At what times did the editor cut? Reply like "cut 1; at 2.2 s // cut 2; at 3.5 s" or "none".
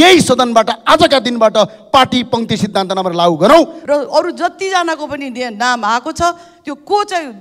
cut 1; at 3.8 s